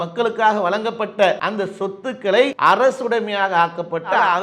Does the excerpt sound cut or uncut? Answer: cut